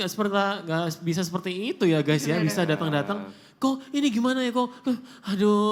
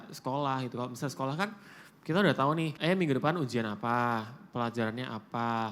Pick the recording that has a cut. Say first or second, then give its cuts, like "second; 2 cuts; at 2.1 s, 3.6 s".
second; 1 cut; at 2.7 s